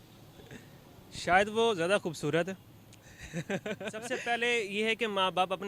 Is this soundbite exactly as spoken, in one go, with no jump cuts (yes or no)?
no